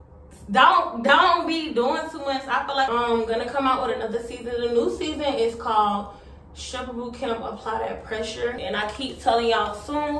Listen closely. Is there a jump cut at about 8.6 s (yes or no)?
yes